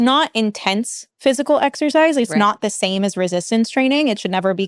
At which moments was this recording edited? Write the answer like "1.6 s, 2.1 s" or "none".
none